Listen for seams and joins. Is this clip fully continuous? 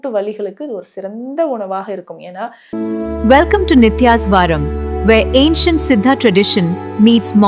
no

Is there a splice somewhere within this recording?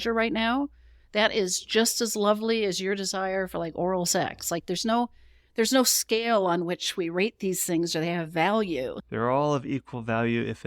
yes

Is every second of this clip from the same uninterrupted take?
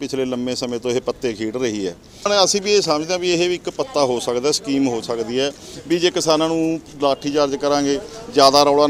no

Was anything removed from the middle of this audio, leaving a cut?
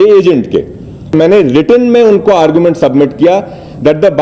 yes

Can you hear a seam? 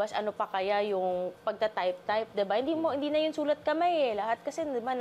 no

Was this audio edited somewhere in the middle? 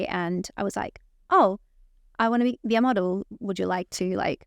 no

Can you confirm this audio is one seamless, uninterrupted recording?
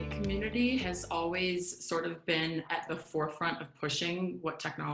yes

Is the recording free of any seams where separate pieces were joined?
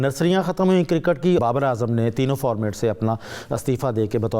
no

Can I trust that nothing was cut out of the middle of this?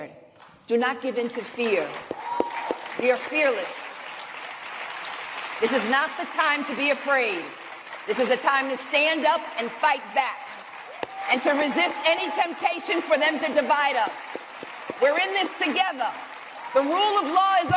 yes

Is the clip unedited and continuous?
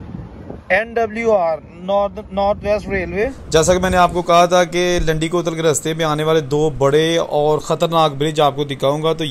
no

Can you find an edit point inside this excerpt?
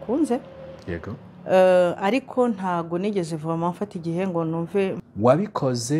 yes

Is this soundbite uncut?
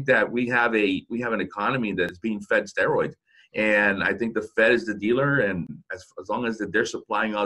no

